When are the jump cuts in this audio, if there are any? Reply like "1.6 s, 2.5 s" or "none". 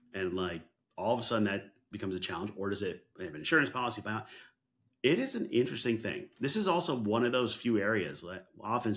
none